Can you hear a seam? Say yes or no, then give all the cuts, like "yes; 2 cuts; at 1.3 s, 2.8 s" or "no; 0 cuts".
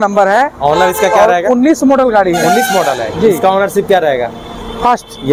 no; 0 cuts